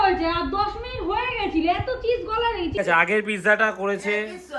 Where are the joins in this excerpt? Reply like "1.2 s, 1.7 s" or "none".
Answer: 2.7 s